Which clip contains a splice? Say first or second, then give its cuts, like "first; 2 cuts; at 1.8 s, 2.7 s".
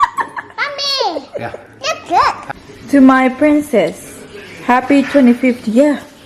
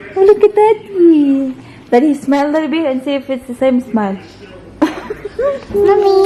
first; 1 cut; at 2.4 s